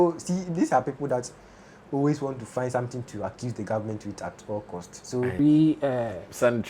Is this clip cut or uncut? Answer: cut